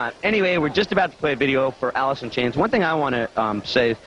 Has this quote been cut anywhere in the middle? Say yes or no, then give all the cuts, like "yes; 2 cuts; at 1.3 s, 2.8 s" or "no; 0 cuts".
yes; 1 cut; at 1.0 s